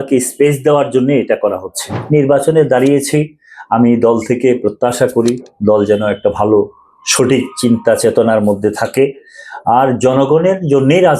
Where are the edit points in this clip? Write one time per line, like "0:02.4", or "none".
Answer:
0:02.0